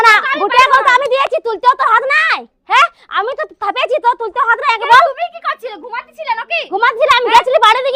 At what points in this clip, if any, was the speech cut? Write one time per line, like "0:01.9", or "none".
none